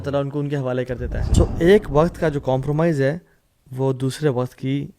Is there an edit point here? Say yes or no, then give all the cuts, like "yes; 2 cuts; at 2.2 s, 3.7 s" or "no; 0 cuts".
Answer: yes; 1 cut; at 1.2 s